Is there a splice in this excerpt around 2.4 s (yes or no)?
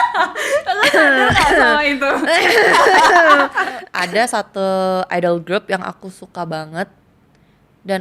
no